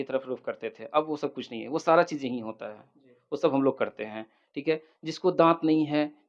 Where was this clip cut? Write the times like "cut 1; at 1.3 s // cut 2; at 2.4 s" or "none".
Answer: none

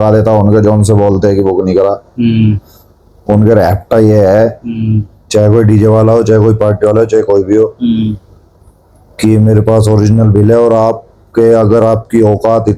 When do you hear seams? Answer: none

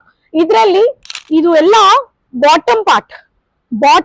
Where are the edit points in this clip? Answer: cut 1; at 1.2 s

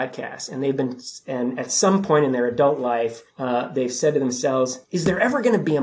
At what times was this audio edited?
cut 1; at 3.3 s // cut 2; at 4.8 s

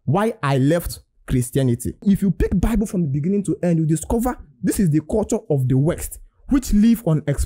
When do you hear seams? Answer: cut 1; at 2.0 s

